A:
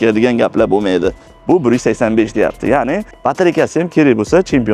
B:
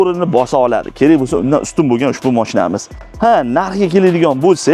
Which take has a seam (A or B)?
A